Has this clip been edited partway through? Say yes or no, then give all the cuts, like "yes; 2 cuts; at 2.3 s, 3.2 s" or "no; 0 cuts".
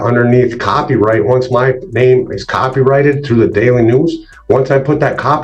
no; 0 cuts